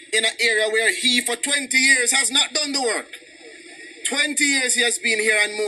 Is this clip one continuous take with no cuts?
yes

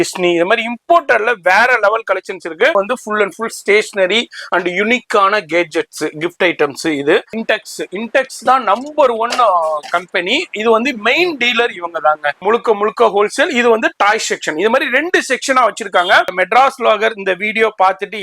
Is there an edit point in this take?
yes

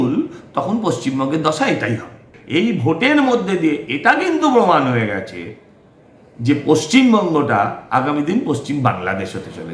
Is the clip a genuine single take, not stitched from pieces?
no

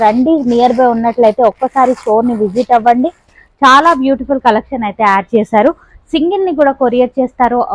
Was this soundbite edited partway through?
no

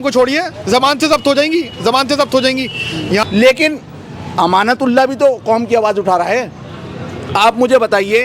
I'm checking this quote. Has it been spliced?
yes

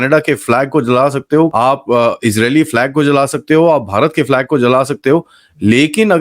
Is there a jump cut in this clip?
yes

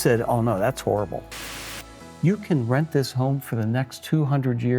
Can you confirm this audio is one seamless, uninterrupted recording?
no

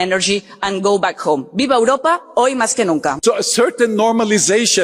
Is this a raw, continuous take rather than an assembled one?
no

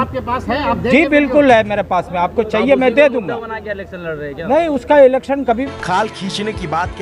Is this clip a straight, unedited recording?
no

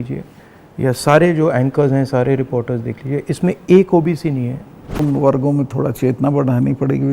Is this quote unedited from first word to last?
no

